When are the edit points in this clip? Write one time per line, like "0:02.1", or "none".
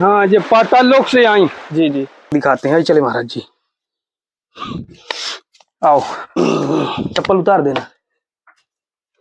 0:02.3

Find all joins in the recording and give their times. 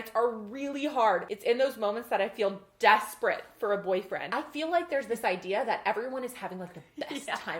0:01.3
0:04.3

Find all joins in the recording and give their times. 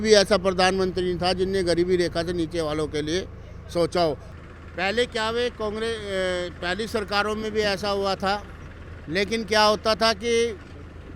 0:04.3

